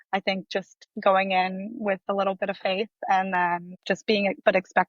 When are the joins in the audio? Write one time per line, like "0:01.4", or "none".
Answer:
0:00.9
0:02.0
0:03.7